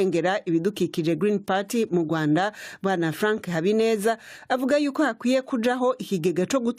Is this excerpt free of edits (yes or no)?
yes